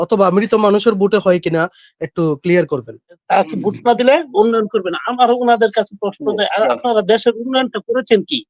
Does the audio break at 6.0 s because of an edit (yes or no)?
no